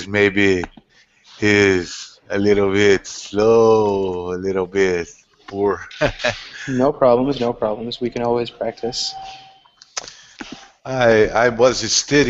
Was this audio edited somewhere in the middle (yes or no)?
yes